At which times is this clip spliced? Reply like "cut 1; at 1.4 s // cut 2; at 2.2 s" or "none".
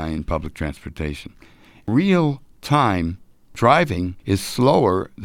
cut 1; at 1.9 s // cut 2; at 3.5 s // cut 3; at 4.2 s

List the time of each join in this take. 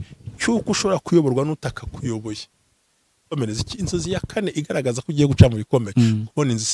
cut 1; at 3.3 s

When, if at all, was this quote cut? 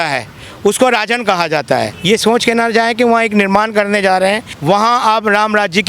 cut 1; at 1.9 s // cut 2; at 4.5 s

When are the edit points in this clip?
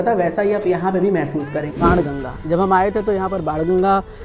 cut 1; at 1.7 s

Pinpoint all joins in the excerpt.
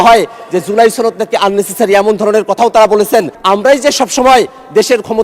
cut 1; at 3.4 s

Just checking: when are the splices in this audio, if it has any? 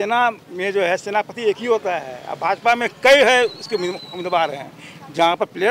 none

